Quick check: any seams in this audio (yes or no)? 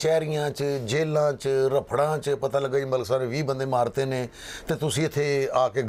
no